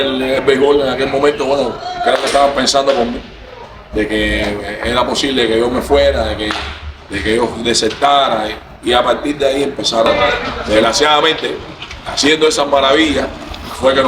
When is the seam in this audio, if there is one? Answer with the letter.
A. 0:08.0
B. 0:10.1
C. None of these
B